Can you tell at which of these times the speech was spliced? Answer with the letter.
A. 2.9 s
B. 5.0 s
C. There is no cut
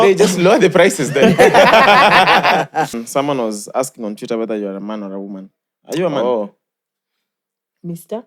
A